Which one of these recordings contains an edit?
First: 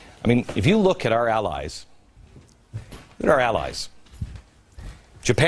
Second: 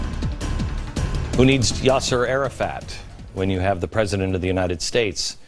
first; 1 cut; at 2.4 s

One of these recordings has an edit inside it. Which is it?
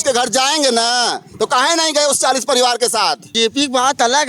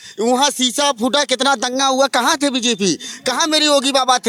first; 1 cut; at 3.3 s

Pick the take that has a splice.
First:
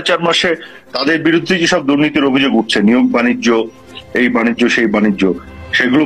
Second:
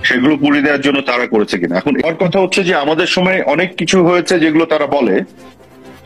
second; 1 cut; at 2.0 s

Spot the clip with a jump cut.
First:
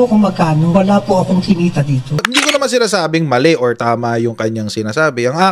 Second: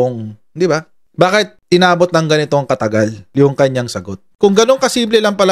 first; 1 cut; at 2.3 s

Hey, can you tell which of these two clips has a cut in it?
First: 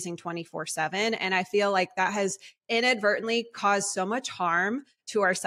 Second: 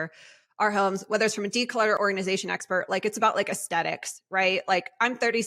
second; 1 cut; at 2.0 s

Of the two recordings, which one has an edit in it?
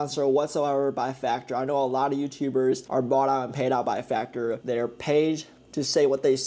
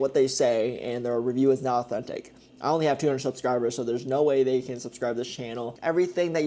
first; 2 cuts; at 2.8 s, 4.6 s

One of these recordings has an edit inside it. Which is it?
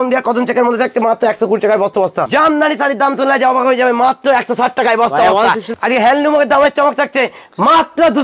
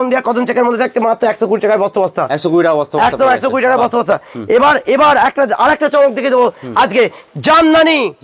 first; 2 cuts; at 2.3 s, 5.7 s

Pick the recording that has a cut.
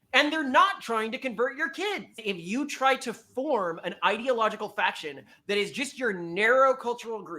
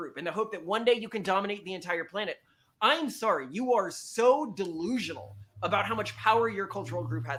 first; 1 cut; at 2.2 s

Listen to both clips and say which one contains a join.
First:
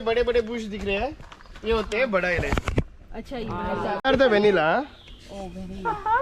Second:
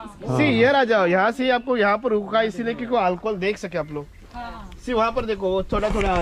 first; 1 cut; at 4.0 s

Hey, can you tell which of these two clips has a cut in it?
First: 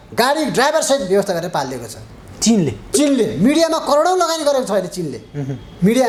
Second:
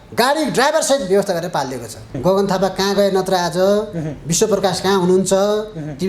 second; 1 cut; at 2.0 s

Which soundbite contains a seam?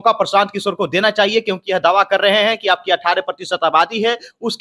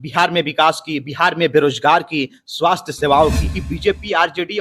second; 1 cut; at 3.6 s

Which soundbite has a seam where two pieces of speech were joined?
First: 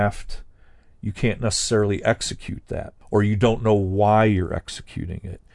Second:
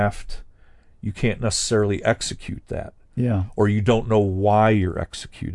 first; 1 cut; at 3.0 s

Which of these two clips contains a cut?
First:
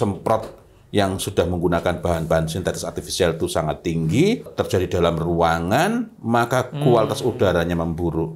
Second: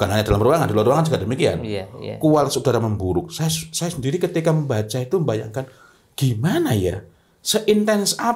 first; 1 cut; at 4.5 s

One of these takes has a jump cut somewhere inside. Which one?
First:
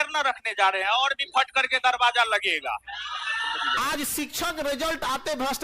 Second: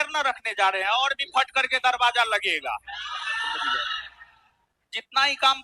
first; 1 cut; at 3.8 s

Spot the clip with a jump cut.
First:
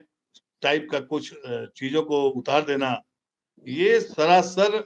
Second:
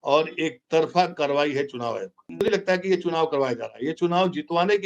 second; 1 cut; at 2.2 s

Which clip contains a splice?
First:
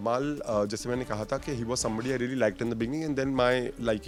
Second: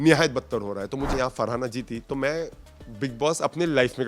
second; 1 cut; at 1.1 s

